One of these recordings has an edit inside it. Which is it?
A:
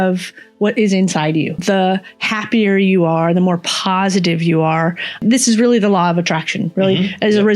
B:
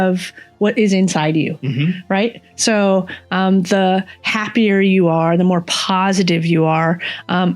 A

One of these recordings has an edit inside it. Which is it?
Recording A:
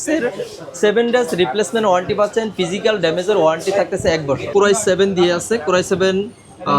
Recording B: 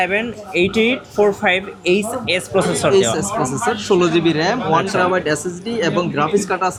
A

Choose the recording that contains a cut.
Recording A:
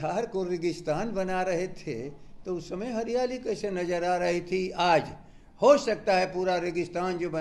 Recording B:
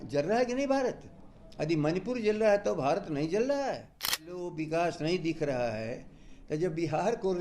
B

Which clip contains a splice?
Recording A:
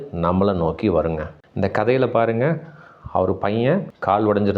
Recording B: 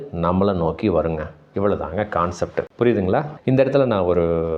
A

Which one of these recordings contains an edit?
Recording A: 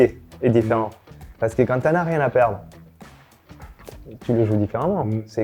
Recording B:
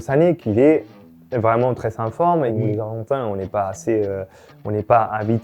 B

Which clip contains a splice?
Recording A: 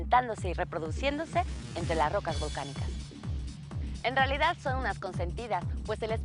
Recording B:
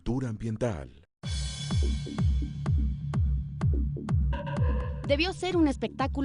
A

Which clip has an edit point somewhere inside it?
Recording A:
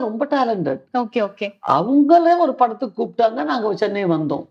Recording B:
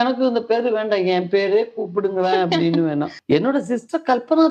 B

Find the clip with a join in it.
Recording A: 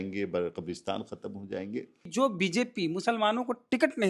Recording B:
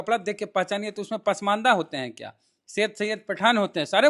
A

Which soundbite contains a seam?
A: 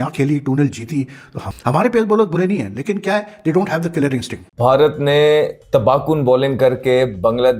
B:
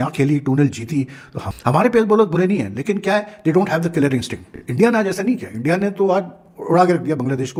A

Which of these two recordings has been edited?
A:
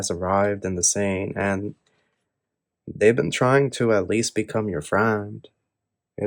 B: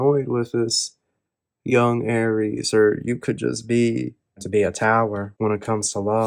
B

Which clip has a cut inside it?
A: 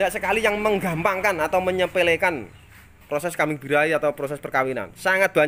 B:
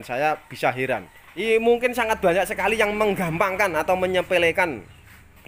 B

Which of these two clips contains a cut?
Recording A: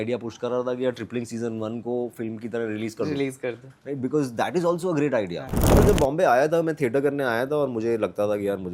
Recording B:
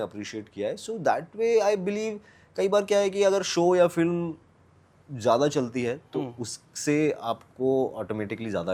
A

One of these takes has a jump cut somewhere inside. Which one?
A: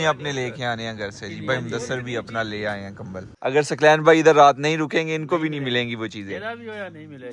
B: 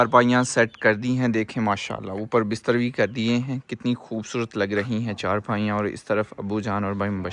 A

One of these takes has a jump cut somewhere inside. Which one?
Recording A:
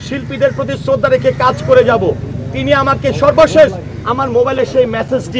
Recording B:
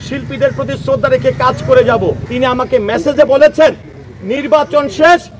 B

